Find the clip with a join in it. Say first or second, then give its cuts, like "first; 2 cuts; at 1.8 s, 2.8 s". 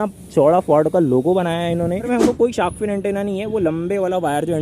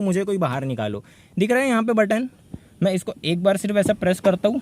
first; 1 cut; at 2.1 s